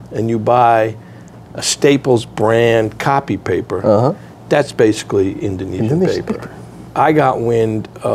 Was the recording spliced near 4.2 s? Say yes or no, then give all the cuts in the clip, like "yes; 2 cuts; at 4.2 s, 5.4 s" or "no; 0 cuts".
no; 1 cut; at 6.8 s